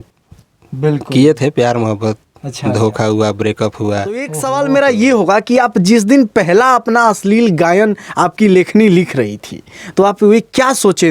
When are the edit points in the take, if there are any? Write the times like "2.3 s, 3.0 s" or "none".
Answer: 4.4 s